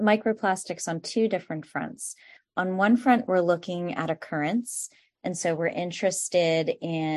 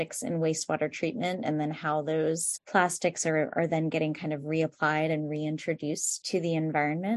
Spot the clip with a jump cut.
second; 2 cuts; at 2.5 s, 6.2 s

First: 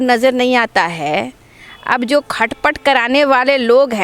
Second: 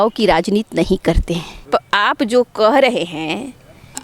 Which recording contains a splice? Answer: second; 1 cut; at 1.5 s

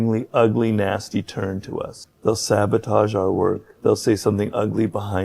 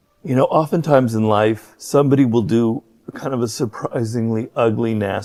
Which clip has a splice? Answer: first; 2 cuts; at 2.0 s, 3.7 s

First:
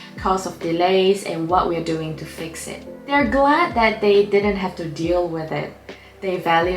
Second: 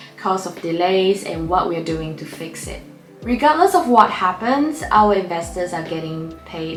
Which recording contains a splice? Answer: first; 1 cut; at 2.9 s

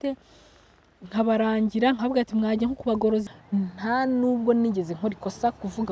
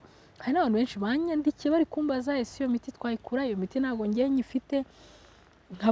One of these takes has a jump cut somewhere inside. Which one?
first; 1 cut; at 3.2 s

